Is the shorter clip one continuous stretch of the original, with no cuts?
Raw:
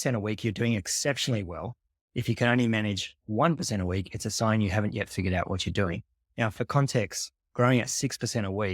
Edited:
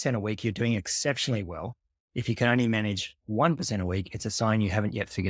yes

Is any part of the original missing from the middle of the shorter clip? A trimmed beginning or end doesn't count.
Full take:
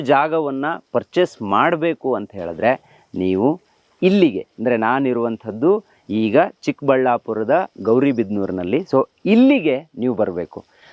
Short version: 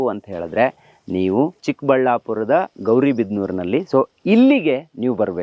yes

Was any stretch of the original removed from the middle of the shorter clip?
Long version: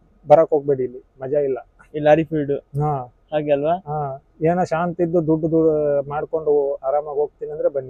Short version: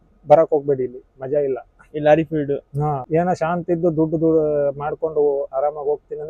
yes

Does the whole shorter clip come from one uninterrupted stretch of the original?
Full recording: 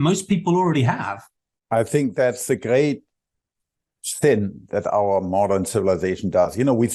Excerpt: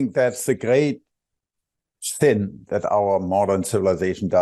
yes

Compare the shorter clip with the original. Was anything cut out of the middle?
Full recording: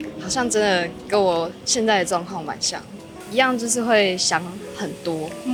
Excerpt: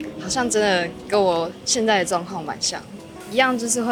no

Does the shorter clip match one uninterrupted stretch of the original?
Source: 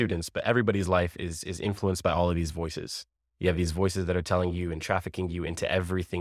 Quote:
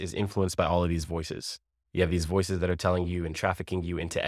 yes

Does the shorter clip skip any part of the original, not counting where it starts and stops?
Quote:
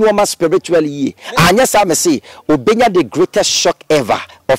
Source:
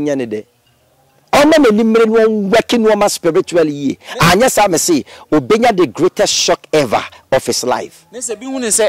no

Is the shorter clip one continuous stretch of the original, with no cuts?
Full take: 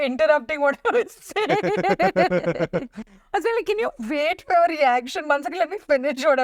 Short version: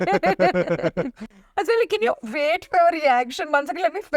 yes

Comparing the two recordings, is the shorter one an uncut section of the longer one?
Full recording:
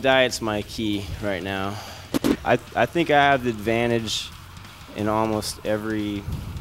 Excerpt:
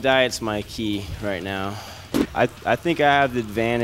no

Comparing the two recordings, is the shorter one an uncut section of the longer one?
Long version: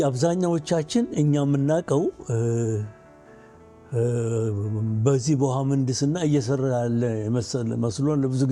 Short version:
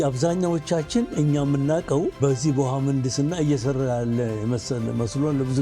no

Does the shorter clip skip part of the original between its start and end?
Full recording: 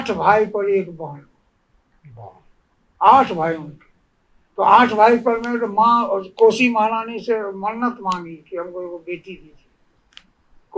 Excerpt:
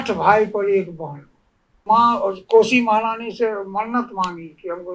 yes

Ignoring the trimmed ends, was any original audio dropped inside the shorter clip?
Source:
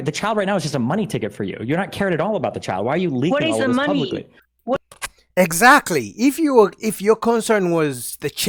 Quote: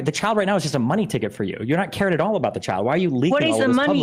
no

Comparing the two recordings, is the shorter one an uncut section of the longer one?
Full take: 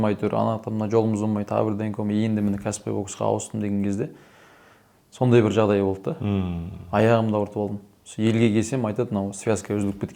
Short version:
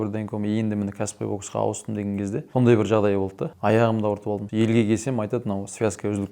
no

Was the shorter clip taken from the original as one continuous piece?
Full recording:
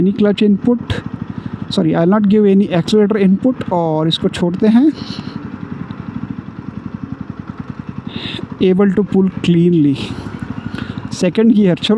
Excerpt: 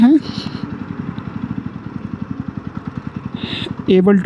yes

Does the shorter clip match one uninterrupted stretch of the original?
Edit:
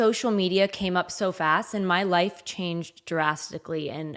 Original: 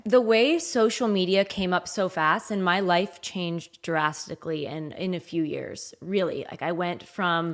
yes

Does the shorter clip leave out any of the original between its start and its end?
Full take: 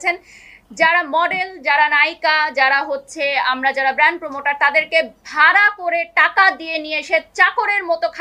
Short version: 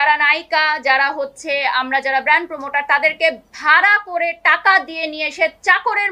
no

